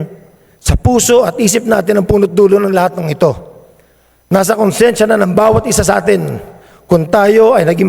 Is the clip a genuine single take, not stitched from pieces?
yes; 0 cuts

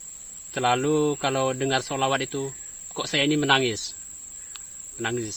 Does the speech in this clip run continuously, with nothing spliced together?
yes; 0 cuts

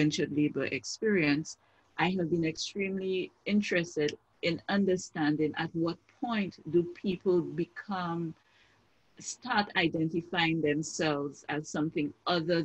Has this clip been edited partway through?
no; 0 cuts

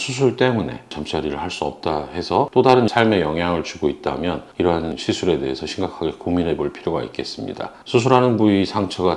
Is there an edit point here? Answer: yes; 3 cuts; at 0.9 s, 2.5 s, 5.0 s

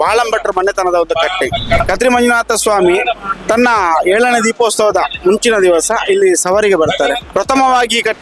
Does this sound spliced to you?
yes; 2 cuts; at 1.8 s, 7.3 s

